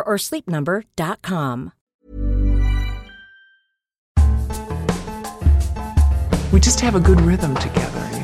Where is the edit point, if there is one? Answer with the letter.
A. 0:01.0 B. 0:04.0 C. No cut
B